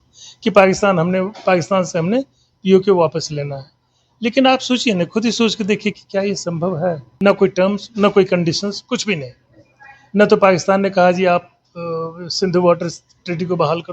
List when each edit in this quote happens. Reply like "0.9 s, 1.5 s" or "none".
7.1 s